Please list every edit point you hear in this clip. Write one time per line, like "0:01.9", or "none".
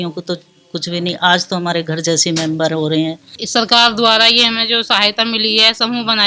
0:03.3

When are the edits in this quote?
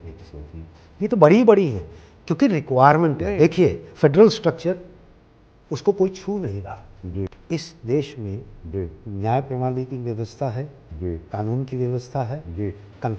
0:07.4

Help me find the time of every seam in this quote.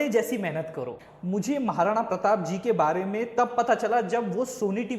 0:01.1

